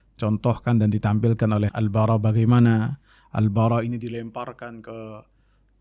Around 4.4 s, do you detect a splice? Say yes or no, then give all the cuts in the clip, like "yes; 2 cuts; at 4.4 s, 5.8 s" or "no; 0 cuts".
no; 1 cut; at 1.7 s